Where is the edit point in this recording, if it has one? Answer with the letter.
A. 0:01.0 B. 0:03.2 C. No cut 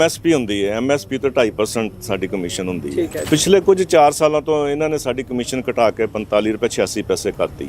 B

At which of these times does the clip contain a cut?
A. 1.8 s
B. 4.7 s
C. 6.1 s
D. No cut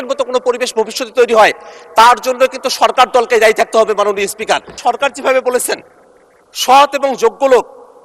B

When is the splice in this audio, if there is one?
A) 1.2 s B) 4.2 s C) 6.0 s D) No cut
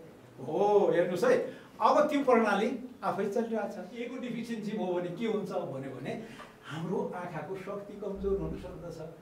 B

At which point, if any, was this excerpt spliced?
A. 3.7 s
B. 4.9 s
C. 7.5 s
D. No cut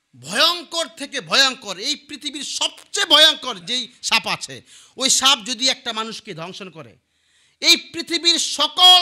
D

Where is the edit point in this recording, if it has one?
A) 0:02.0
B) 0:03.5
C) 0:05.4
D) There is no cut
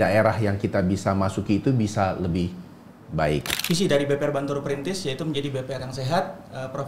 B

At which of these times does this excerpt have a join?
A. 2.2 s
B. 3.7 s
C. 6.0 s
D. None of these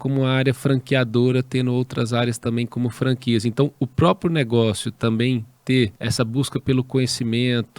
C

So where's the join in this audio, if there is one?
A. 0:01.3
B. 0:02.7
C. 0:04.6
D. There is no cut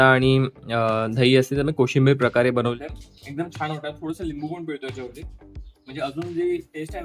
B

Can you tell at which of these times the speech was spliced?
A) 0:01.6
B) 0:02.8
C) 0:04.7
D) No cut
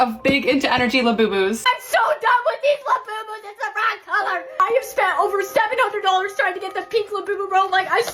A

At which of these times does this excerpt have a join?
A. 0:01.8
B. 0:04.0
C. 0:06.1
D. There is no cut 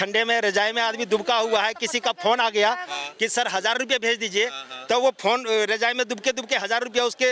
D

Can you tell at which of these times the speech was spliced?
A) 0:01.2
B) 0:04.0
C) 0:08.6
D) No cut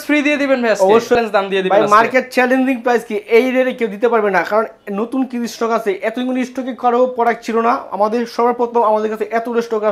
A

